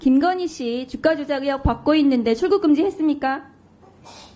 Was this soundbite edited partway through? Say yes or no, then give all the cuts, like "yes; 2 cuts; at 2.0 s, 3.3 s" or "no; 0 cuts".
no; 0 cuts